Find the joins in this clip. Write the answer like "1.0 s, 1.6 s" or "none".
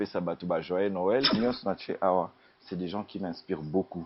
1.3 s